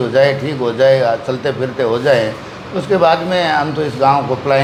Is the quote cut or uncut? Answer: uncut